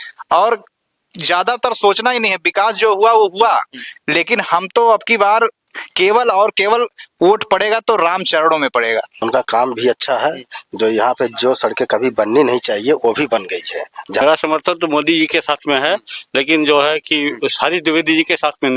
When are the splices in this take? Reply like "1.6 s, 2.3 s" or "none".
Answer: 9.1 s, 14.2 s